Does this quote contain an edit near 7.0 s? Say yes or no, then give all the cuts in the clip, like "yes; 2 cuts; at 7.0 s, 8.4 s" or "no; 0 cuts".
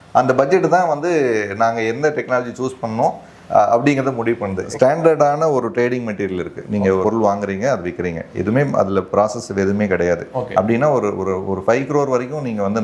yes; 2 cuts; at 4.6 s, 7.0 s